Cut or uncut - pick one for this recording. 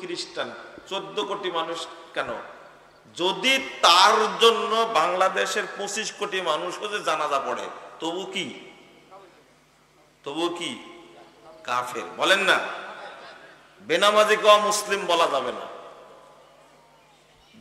uncut